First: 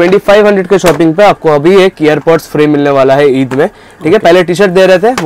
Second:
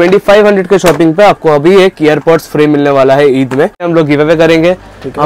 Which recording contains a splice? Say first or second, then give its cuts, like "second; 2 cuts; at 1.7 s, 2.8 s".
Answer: second; 1 cut; at 3.9 s